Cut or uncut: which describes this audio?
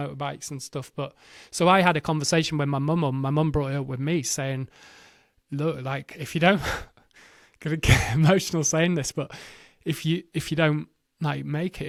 uncut